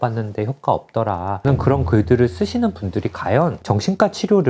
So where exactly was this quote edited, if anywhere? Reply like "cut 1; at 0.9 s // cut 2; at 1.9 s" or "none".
cut 1; at 1.4 s

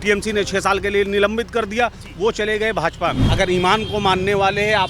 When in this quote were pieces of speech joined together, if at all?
cut 1; at 3.2 s

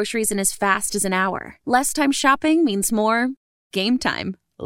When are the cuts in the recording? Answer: none

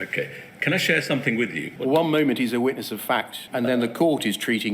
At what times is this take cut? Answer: cut 1; at 1.7 s // cut 2; at 3.4 s

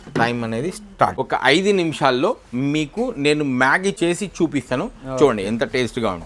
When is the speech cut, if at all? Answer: cut 1; at 1.1 s // cut 2; at 4.0 s

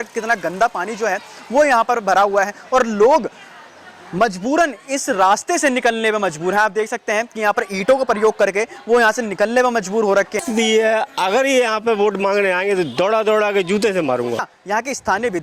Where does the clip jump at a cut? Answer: cut 1; at 10.4 s // cut 2; at 14.5 s

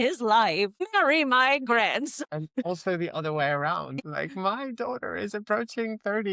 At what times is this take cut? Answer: cut 1; at 0.9 s // cut 2; at 2.3 s // cut 3; at 4.0 s

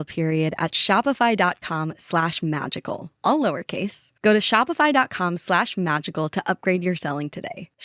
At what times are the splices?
none

